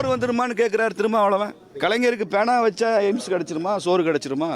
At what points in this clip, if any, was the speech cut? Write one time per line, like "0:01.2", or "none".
0:01.6